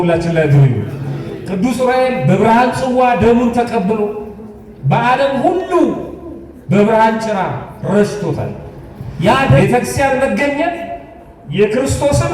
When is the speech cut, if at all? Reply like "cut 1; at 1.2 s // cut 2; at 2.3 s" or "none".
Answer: cut 1; at 9.6 s